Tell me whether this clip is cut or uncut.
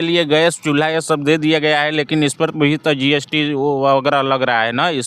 uncut